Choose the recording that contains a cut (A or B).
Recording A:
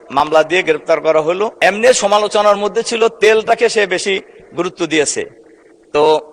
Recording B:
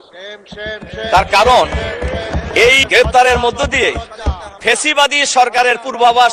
A